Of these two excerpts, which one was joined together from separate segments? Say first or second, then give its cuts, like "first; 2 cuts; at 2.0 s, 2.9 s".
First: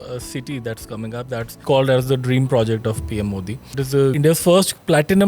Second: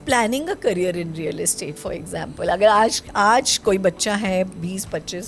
first; 2 cuts; at 1.5 s, 4.1 s